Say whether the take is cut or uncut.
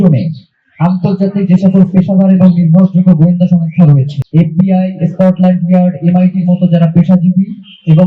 cut